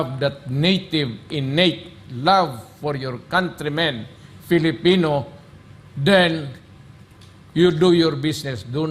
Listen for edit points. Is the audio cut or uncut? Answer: uncut